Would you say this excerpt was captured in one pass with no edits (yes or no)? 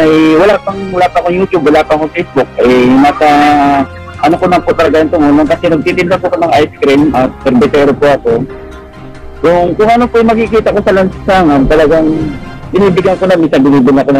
yes